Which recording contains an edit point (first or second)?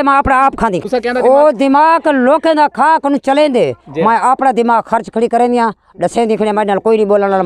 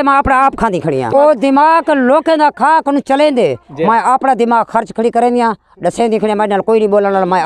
second